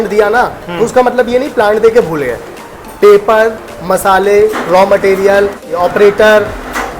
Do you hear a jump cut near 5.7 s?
yes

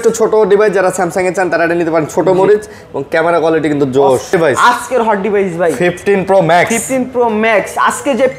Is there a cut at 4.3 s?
yes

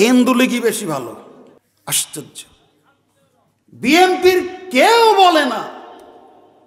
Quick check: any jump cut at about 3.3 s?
no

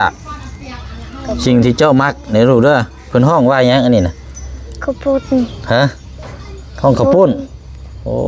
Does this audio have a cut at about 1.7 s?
no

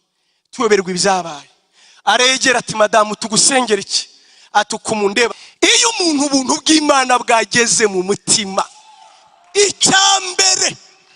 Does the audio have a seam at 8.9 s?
no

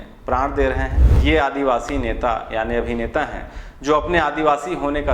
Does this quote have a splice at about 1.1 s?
yes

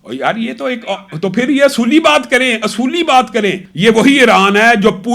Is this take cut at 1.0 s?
no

